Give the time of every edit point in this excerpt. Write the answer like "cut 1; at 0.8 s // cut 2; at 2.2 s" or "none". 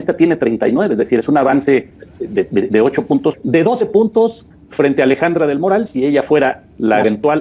cut 1; at 3.4 s